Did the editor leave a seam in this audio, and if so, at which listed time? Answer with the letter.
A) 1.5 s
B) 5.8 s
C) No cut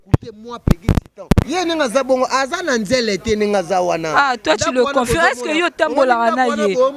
A